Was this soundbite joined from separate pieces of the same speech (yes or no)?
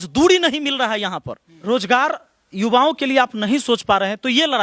no